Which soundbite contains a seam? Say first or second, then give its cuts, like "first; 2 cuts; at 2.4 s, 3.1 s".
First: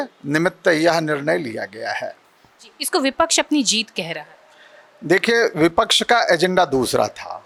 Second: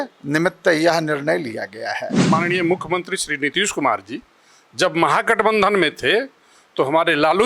second; 1 cut; at 2.2 s